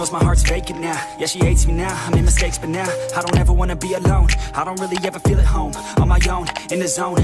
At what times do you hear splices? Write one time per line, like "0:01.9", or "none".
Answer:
0:04.5